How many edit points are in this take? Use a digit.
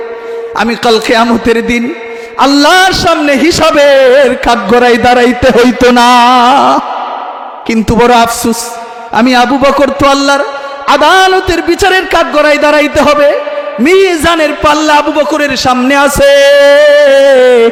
0